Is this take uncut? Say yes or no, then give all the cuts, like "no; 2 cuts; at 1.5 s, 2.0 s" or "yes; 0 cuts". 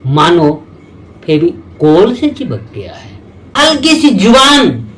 no; 1 cut; at 3.6 s